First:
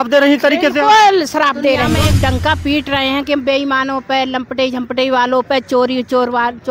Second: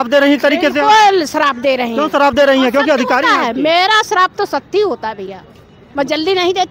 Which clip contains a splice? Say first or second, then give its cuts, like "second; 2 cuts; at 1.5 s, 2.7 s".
first; 1 cut; at 1.9 s